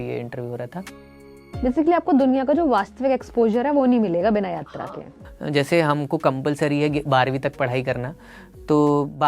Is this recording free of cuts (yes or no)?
no